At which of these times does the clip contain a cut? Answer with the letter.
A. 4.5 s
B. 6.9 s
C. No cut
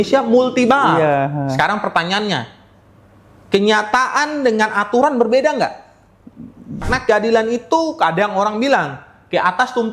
B